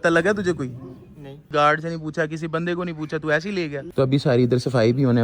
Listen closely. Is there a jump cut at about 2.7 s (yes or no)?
no